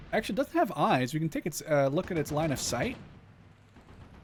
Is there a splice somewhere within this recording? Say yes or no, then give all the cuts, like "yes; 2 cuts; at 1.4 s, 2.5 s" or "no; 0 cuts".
no; 0 cuts